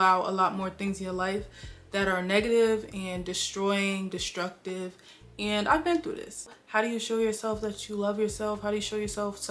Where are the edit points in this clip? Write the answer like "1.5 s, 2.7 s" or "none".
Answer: 6.5 s

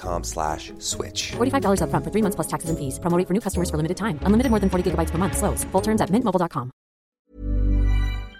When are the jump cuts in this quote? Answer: 7.2 s

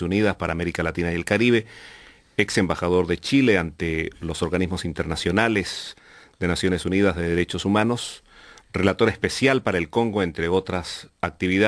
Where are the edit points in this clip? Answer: 9.7 s

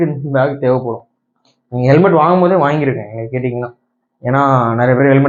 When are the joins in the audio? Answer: none

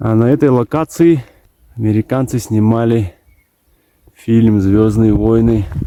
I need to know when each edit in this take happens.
none

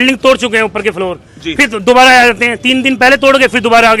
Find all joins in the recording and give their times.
none

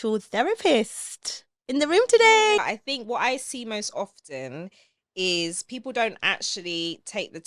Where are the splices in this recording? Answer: 2.8 s

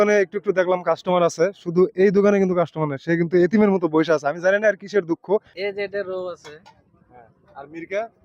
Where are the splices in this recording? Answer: 5.6 s

